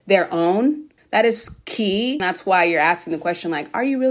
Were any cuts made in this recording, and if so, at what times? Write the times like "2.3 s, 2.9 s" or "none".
0.9 s, 2.2 s